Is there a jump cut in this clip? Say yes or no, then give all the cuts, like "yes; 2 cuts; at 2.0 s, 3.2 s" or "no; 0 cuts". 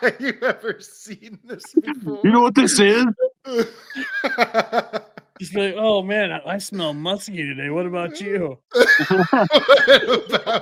no; 0 cuts